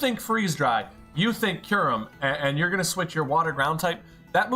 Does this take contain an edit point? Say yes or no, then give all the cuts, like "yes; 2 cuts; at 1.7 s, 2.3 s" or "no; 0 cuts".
no; 0 cuts